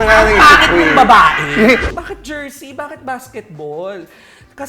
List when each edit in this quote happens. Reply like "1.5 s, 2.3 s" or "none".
1.9 s